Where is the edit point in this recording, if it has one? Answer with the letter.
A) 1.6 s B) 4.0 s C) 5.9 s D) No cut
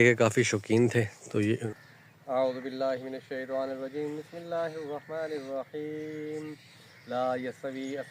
A